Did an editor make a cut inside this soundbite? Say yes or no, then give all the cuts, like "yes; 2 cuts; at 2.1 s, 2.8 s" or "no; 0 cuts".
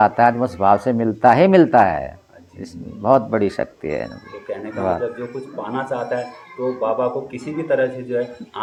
no; 0 cuts